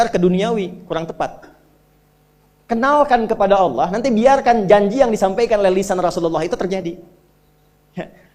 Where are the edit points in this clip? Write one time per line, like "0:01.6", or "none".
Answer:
none